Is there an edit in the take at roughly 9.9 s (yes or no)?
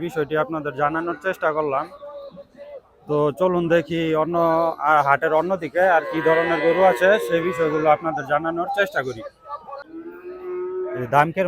yes